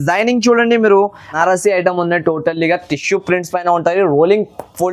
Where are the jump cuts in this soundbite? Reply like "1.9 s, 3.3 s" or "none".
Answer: 1.2 s